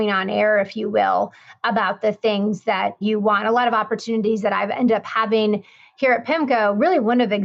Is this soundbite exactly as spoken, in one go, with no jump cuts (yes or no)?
yes